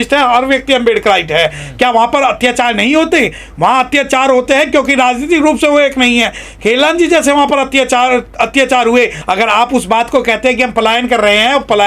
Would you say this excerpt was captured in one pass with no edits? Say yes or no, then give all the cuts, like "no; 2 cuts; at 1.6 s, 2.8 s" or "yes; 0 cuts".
no; 1 cut; at 9.2 s